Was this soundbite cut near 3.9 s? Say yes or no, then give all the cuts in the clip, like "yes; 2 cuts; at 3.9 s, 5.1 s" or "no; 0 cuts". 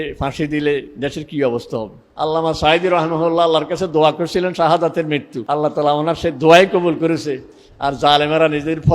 no; 2 cuts; at 2.1 s, 5.3 s